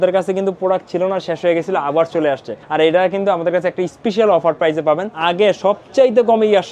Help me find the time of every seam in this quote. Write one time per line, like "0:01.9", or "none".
0:02.5
0:05.1